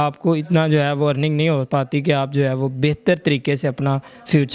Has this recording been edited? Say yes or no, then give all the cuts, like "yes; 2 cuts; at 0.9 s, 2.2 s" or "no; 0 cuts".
no; 0 cuts